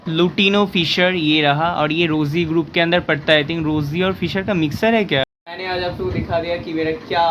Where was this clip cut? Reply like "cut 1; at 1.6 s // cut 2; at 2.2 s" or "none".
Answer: cut 1; at 5.2 s